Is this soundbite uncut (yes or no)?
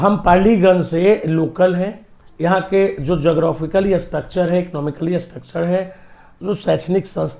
yes